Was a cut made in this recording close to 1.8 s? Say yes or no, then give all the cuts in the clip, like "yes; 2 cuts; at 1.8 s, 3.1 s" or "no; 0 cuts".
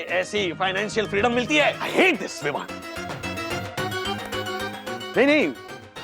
yes; 1 cut; at 1.8 s